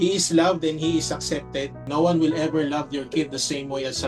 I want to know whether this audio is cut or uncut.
cut